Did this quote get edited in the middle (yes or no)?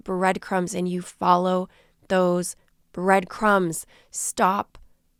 no